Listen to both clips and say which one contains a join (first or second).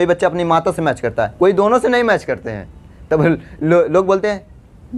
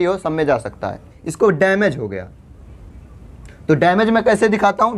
second